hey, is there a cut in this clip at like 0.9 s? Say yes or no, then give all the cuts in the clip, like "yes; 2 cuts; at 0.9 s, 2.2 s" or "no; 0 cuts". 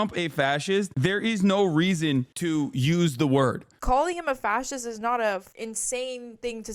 yes; 2 cuts; at 0.9 s, 3.7 s